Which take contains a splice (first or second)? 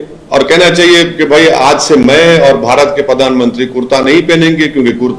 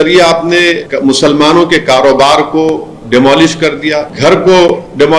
second